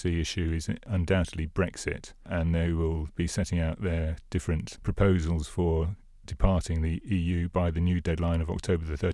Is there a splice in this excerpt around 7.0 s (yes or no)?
yes